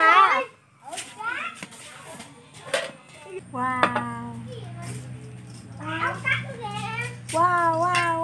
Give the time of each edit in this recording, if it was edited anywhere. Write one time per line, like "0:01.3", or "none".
0:03.4